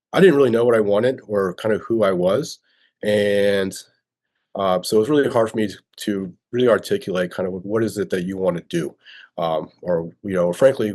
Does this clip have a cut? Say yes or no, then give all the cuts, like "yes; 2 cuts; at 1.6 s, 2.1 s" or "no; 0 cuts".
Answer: no; 0 cuts